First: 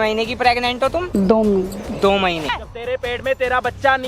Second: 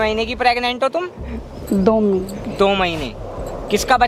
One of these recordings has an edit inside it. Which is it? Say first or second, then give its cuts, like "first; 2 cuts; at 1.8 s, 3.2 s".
first; 2 cuts; at 0.9 s, 3.0 s